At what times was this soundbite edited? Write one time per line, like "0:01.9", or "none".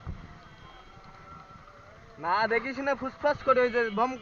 none